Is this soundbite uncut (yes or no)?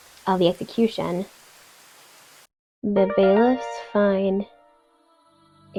yes